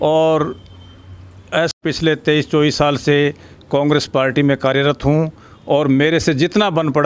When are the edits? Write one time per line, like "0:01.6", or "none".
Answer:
0:01.8